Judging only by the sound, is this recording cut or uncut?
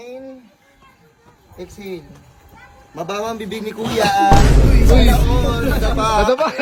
uncut